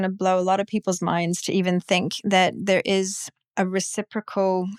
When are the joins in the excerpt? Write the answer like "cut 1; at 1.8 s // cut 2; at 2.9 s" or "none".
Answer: none

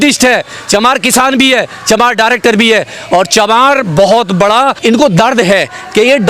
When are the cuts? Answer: cut 1; at 4.8 s

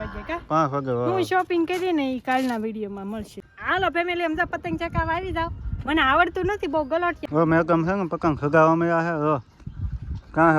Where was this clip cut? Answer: cut 1; at 3.4 s // cut 2; at 7.2 s

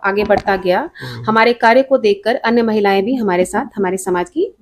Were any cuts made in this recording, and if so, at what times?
none

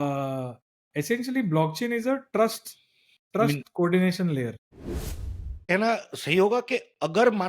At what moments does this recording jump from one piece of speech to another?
cut 1; at 5.2 s

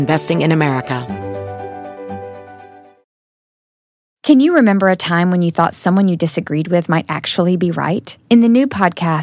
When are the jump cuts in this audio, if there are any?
cut 1; at 1.0 s

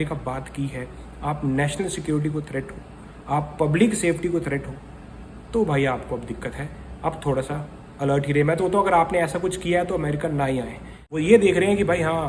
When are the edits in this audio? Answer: cut 1; at 11.2 s

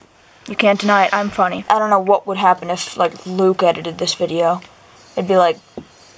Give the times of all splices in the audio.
cut 1; at 1.6 s

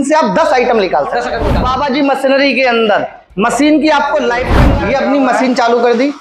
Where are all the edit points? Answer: cut 1; at 1.6 s // cut 2; at 4.6 s

